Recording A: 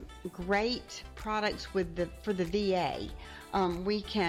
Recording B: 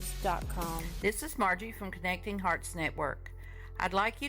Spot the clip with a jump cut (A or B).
B